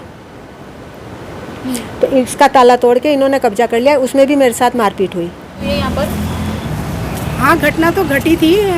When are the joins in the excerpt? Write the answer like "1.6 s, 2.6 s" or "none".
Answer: 5.6 s